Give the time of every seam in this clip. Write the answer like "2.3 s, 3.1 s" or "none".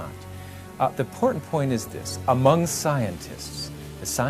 none